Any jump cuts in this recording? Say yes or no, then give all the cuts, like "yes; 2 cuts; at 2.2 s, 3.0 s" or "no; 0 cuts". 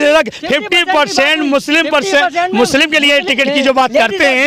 no; 0 cuts